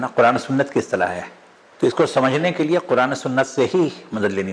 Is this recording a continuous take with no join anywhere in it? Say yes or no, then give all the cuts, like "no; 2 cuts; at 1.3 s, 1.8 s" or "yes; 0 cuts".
no; 1 cut; at 1.6 s